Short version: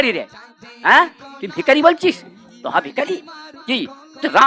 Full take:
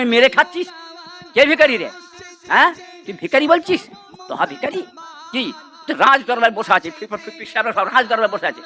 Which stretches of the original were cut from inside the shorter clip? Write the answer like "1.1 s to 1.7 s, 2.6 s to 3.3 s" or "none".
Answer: none